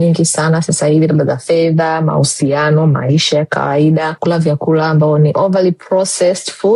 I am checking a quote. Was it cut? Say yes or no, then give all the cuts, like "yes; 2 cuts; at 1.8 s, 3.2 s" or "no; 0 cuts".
yes; 1 cut; at 4.2 s